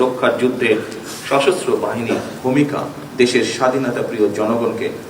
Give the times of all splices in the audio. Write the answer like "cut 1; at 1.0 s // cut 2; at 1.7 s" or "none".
cut 1; at 2.3 s // cut 2; at 3.0 s

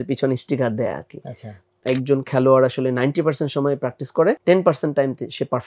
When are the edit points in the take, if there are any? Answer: cut 1; at 1.7 s // cut 2; at 4.4 s

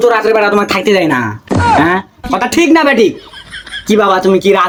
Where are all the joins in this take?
none

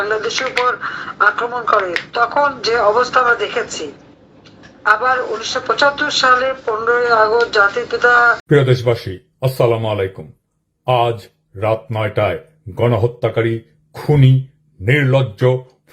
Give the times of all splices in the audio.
cut 1; at 8.4 s

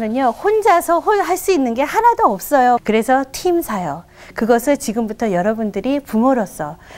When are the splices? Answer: cut 1; at 2.8 s

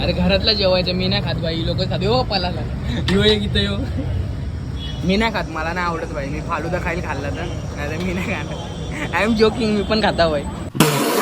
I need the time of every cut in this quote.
none

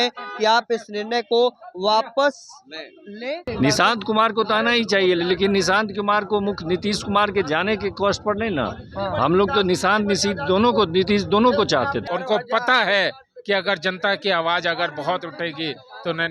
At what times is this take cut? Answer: cut 1; at 3.5 s // cut 2; at 12.0 s

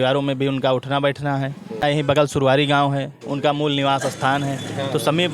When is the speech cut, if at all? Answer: cut 1; at 1.9 s

